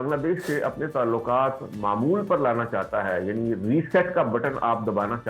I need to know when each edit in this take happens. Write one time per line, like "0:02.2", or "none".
none